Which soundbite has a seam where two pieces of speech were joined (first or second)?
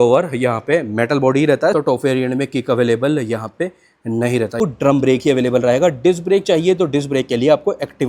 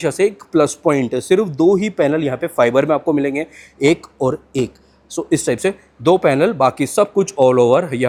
first